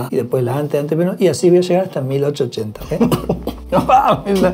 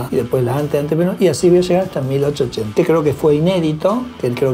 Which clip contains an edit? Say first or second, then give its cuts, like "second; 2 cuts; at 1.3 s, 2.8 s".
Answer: second; 1 cut; at 2.7 s